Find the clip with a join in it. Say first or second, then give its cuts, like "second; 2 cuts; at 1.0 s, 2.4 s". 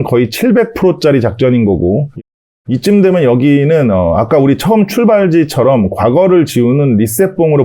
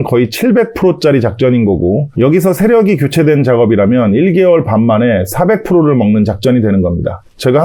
first; 1 cut; at 2.2 s